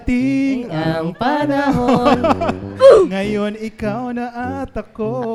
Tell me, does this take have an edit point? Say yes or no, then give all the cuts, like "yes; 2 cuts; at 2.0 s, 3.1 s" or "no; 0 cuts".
no; 0 cuts